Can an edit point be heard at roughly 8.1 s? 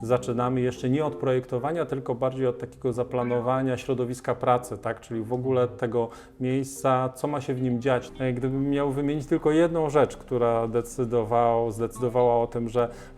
yes; 1 cut; at 8.1 s

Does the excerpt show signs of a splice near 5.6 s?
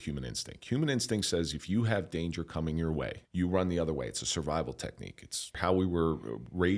yes; 2 cuts; at 3.2 s, 5.6 s

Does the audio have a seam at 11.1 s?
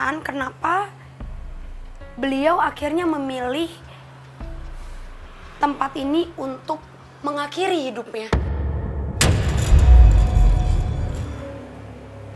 yes; 1 cut; at 11.1 s

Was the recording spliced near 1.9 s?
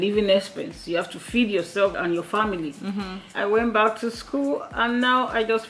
yes; 2 cuts; at 1.9 s, 3.2 s

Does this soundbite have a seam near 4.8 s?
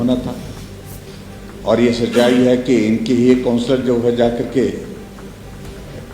no; 1 cut; at 1.1 s

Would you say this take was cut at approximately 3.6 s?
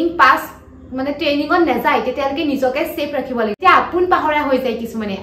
yes; 1 cut; at 3.6 s

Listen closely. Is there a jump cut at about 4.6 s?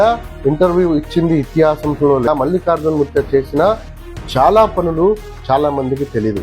no; 1 cut; at 2.3 s

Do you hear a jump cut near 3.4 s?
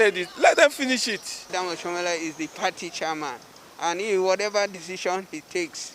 no; 1 cut; at 1.6 s

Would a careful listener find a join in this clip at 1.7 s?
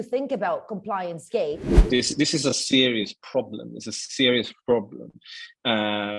yes; 1 cut; at 1.7 s

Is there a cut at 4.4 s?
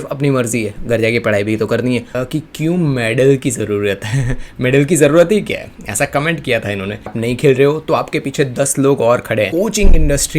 no; 3 cuts; at 2.1 s, 7.1 s, 9.5 s

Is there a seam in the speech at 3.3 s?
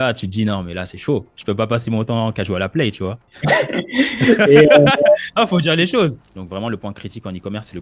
yes; 2 cuts; at 3.3 s, 6.2 s

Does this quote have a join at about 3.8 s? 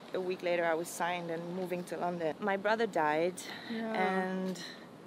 no; 1 cut; at 2.4 s

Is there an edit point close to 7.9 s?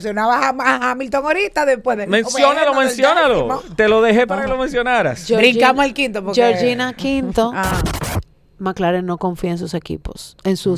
yes; 1 cut; at 7.9 s

